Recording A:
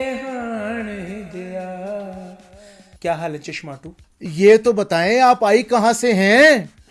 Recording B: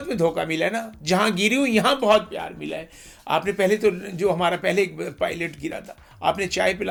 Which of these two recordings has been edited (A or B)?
A